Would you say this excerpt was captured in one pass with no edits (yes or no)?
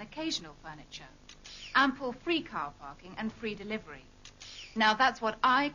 yes